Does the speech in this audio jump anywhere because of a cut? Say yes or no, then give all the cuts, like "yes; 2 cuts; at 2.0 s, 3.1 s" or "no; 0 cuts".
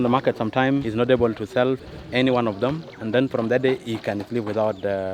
no; 0 cuts